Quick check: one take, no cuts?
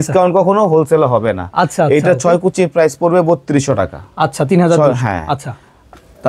yes; 0 cuts

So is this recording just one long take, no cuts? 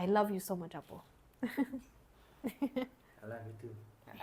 yes; 0 cuts

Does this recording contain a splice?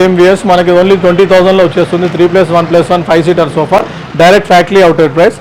no; 0 cuts

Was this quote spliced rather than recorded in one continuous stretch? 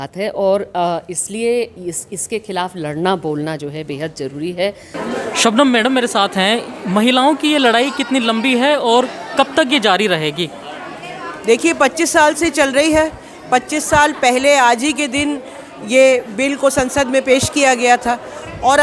yes; 1 cut; at 4.8 s

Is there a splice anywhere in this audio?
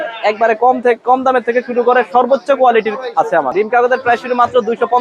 yes; 1 cut; at 3.5 s

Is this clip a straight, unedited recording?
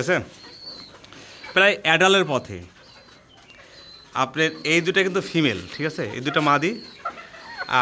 yes; 0 cuts

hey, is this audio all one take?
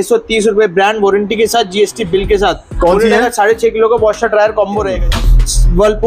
no; 1 cut; at 4.9 s

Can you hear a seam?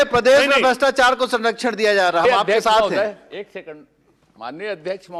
no; 0 cuts

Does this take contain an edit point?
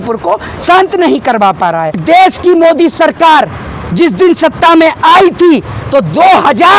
yes; 1 cut; at 2.0 s

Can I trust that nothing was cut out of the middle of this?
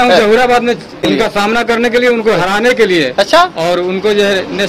no; 1 cut; at 1.0 s

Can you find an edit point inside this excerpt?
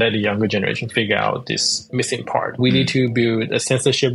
yes; 1 cut; at 2.6 s

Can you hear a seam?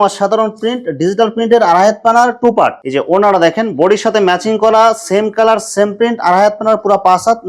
yes; 1 cut; at 2.8 s

